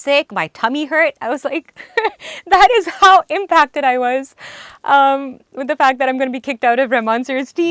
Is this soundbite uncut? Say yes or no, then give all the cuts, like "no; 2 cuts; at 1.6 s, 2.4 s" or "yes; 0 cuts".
yes; 0 cuts